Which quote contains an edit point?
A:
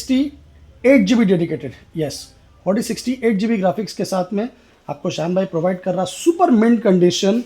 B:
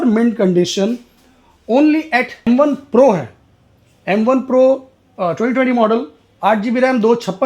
B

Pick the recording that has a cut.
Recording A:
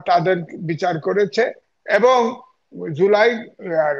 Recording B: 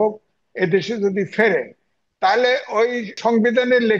B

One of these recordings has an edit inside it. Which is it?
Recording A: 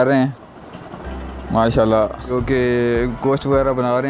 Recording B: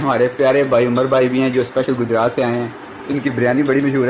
A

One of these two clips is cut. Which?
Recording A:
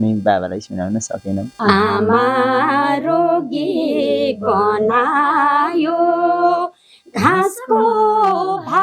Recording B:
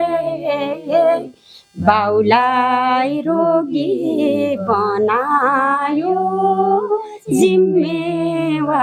A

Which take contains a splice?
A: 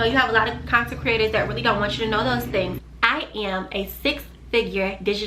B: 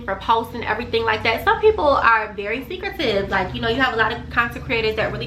A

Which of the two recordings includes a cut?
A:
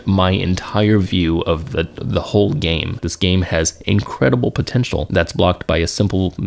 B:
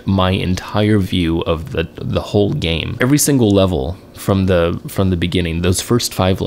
A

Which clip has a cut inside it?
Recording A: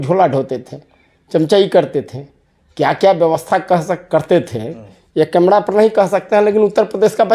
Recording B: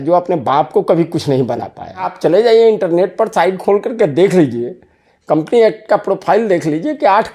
B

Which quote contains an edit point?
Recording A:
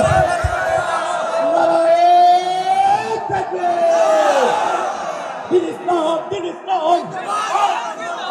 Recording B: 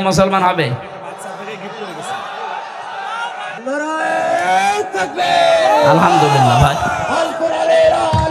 B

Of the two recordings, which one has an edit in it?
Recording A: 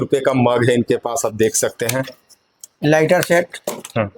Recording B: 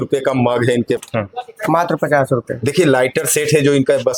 B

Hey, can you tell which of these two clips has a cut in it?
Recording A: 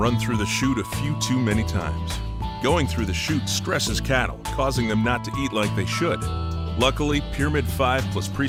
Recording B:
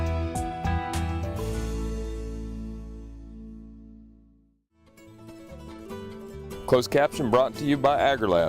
B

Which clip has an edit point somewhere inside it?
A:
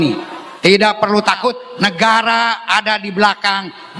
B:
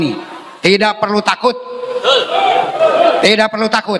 A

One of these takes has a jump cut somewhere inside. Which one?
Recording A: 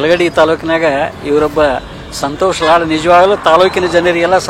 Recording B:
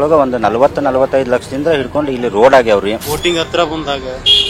B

